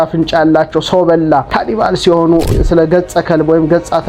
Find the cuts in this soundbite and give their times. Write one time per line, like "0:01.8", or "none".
0:01.5
0:02.5